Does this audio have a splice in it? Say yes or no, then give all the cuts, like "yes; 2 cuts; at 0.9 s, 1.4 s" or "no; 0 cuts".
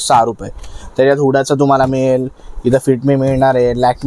no; 0 cuts